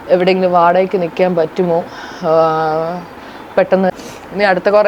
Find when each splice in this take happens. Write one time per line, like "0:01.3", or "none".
0:03.9